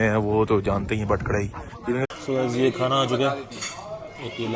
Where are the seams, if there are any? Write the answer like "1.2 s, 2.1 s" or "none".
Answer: 2.1 s